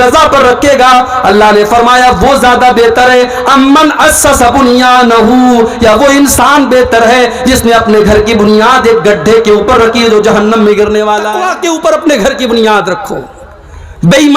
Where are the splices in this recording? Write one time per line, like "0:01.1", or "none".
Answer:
0:11.3